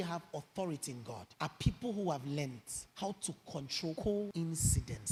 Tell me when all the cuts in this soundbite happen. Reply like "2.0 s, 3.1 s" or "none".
none

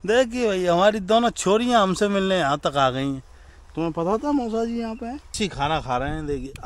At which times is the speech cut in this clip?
5.4 s

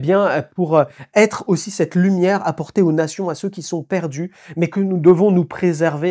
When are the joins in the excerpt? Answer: none

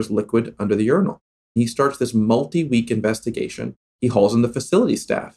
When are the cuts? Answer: 1.4 s, 3.9 s

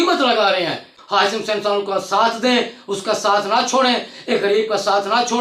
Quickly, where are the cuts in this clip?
1.0 s

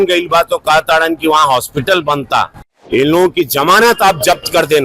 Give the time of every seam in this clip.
2.7 s

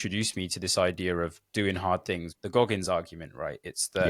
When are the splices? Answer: 2.3 s

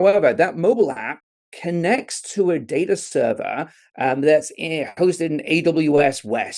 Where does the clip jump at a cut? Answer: none

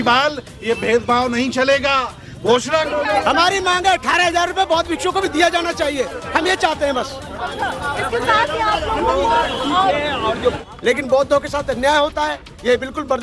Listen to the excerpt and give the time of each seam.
2.9 s, 10.6 s

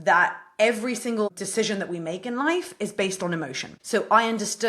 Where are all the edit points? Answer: 1.4 s, 3.7 s

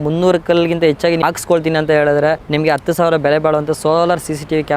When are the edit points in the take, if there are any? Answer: 1.2 s, 2.4 s

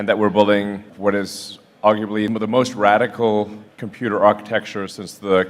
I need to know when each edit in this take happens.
0.9 s, 2.3 s

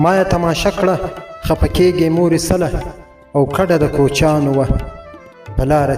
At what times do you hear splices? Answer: none

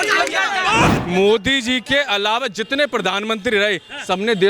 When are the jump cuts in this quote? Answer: 0.9 s

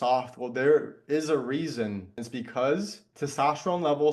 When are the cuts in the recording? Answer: 2.2 s, 3.0 s

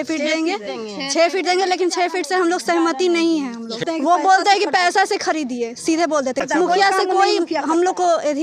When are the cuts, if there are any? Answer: 3.8 s, 6.4 s

